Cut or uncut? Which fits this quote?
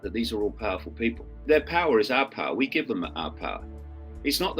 cut